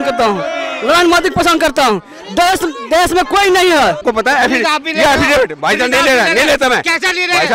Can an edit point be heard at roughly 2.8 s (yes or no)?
no